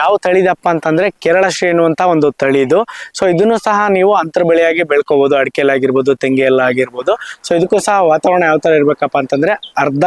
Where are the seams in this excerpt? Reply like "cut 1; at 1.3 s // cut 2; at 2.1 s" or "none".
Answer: none